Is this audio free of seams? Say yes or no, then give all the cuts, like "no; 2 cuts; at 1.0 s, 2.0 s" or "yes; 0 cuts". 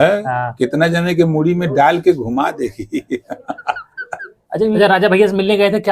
no; 1 cut; at 4.8 s